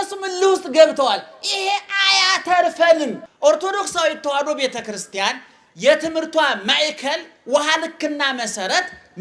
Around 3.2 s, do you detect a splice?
yes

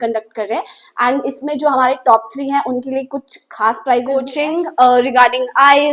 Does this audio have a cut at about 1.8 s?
no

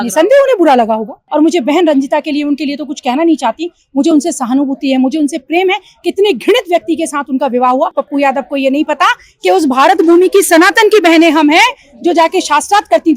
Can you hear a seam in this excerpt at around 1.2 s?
yes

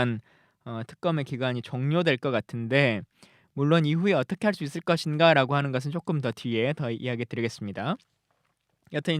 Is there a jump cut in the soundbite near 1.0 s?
yes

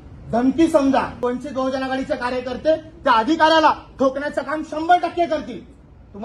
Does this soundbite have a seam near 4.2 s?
no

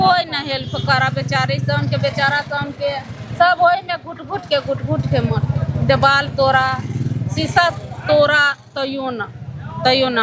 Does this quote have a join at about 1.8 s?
no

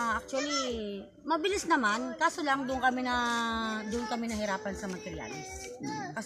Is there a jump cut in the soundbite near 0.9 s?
no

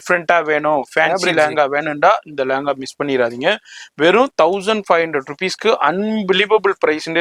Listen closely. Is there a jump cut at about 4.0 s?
no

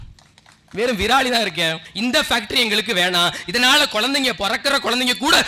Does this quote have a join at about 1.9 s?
yes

